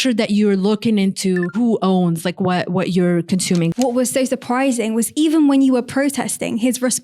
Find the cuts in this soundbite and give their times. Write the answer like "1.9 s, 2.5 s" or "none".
1.5 s, 3.7 s